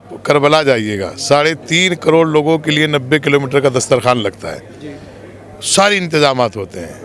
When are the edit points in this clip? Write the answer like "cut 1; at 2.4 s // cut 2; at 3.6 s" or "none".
none